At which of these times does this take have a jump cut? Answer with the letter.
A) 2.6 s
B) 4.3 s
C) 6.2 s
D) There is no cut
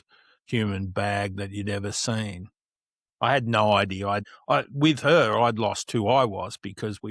B